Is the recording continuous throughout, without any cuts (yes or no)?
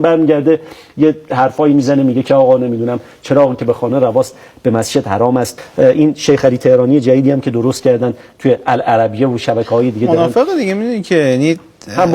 no